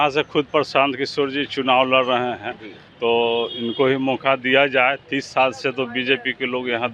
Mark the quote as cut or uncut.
uncut